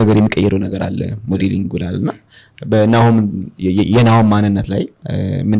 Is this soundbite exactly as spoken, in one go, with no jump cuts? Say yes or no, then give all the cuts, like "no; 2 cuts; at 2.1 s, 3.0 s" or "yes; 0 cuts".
yes; 0 cuts